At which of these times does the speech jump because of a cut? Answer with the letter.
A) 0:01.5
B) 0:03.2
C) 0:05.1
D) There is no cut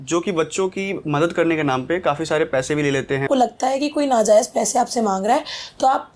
B